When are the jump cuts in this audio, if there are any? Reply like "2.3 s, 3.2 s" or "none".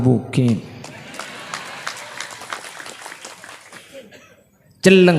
3.8 s